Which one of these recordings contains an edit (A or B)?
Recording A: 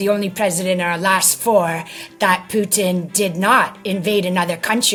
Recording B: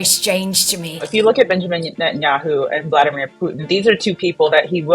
B